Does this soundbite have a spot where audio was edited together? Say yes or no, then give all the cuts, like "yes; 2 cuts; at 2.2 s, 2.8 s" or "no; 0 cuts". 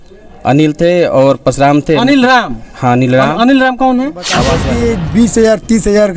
yes; 1 cut; at 4.5 s